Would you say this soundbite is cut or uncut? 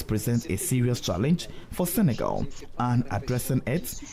uncut